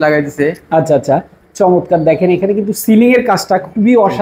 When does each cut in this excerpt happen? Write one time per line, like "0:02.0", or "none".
none